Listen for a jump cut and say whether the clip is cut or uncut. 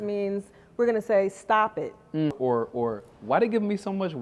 cut